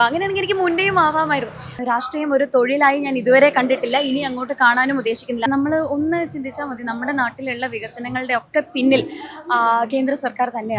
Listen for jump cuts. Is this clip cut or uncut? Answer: cut